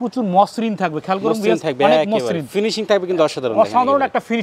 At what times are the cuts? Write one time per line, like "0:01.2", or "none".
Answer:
none